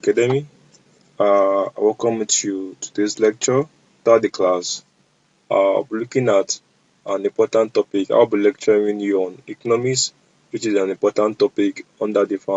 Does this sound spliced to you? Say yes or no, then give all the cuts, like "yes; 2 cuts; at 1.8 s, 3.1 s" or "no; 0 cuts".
yes; 1 cut; at 4.0 s